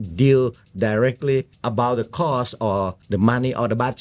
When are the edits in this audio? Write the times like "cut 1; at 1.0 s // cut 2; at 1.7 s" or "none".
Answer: cut 1; at 1.6 s // cut 2; at 3.0 s